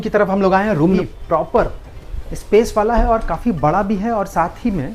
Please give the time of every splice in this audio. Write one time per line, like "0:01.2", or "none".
0:01.0

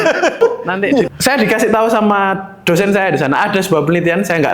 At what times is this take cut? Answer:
0:01.1

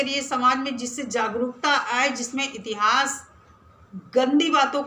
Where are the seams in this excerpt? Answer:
none

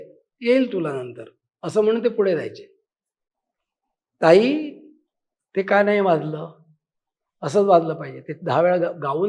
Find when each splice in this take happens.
none

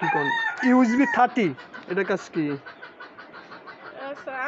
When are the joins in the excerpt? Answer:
none

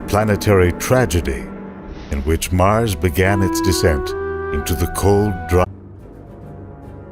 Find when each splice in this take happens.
none

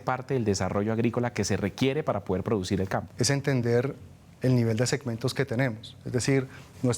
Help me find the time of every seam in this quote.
0:03.1

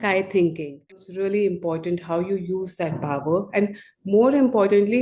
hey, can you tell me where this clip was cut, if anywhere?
0:01.0

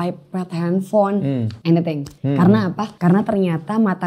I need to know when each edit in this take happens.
0:01.5
0:02.1
0:02.9

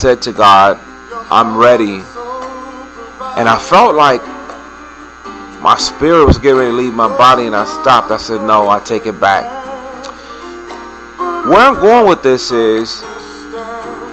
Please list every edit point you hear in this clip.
0:05.9

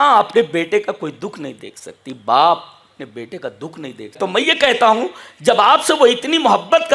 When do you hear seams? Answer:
0:04.1

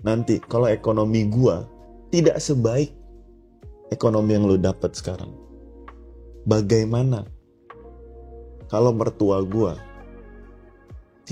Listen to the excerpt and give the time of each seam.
none

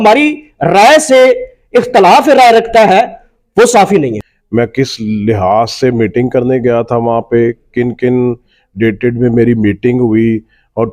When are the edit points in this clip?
0:04.3

